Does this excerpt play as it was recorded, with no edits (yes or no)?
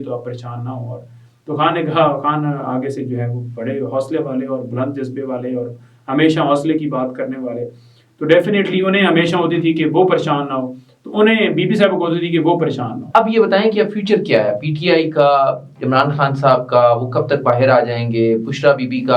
no